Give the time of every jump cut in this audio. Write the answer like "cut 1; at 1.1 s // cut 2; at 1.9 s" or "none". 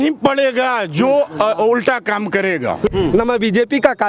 cut 1; at 2.9 s